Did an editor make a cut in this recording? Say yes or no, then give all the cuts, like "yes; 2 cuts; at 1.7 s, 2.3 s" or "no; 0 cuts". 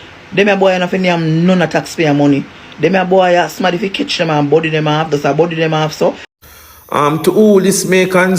yes; 1 cut; at 6.3 s